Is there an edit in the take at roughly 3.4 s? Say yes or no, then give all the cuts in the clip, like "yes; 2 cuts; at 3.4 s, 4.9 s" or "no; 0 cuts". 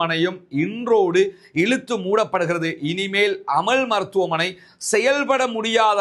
no; 0 cuts